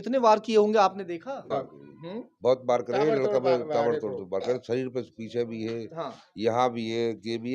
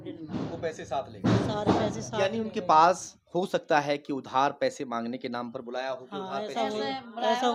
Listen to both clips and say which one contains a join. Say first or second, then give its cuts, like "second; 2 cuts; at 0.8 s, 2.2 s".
first; 1 cut; at 1.5 s